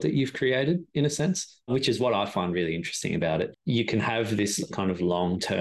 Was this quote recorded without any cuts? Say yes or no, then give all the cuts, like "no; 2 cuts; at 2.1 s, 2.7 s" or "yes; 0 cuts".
no; 2 cuts; at 3.6 s, 4.7 s